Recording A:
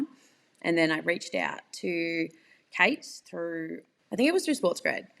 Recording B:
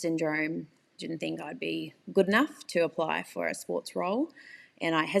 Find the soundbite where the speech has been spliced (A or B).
A